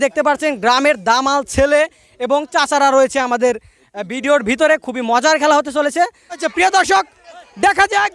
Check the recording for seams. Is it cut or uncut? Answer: cut